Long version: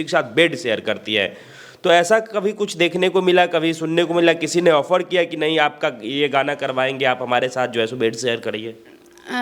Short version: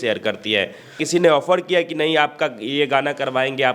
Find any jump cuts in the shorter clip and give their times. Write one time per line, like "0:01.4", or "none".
0:01.0

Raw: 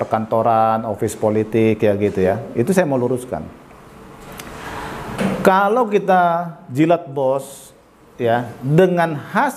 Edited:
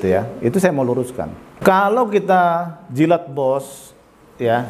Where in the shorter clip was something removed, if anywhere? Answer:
0:01.6

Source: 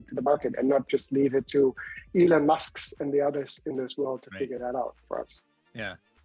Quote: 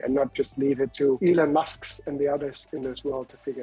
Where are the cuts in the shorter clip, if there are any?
0:01.2

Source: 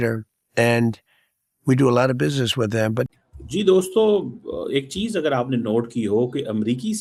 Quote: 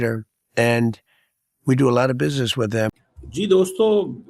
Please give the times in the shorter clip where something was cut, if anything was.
0:02.9

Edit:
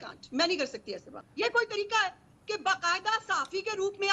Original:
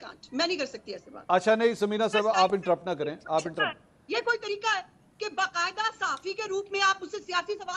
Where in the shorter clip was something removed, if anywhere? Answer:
0:01.1

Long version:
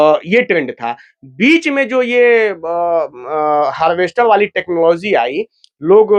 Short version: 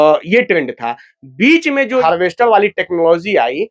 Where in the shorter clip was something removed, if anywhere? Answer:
0:02.0

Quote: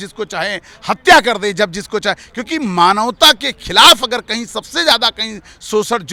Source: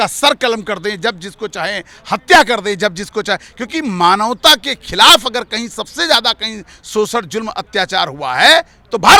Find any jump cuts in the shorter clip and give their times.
none

